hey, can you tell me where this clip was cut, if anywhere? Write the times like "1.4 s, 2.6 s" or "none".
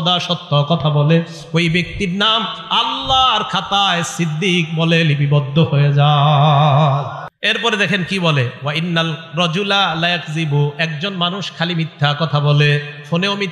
7.3 s